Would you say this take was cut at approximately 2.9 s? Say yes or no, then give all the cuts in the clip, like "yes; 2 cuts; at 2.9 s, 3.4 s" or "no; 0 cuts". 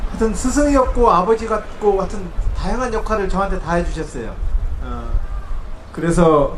yes; 1 cut; at 2.9 s